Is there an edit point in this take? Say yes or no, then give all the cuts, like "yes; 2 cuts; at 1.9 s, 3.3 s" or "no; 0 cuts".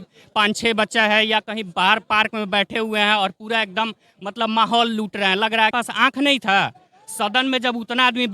yes; 1 cut; at 5.8 s